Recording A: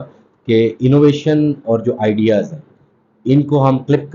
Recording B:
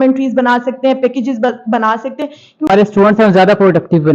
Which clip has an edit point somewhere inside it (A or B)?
B